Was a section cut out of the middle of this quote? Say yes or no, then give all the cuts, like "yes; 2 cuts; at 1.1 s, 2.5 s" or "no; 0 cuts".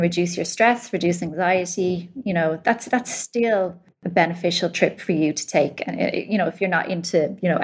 yes; 1 cut; at 3.9 s